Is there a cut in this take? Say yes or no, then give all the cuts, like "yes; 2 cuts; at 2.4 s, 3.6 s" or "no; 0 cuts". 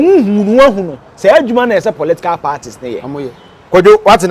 no; 0 cuts